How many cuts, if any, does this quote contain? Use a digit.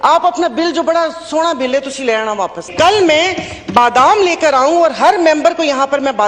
1